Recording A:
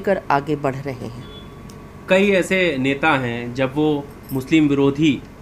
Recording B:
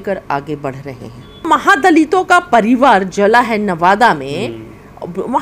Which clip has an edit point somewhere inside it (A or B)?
B